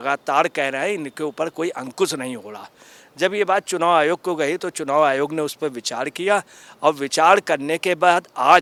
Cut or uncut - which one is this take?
uncut